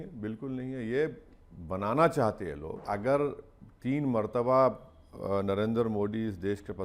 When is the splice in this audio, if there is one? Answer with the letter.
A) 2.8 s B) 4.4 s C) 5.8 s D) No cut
A